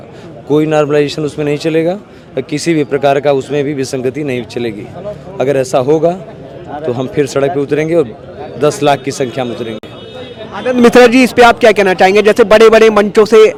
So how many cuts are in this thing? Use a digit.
0